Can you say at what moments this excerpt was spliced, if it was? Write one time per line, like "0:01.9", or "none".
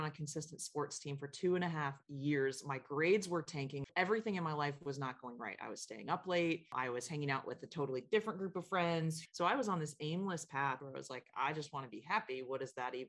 0:03.9
0:09.2
0:10.8